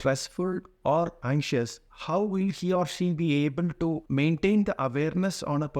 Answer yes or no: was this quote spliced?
yes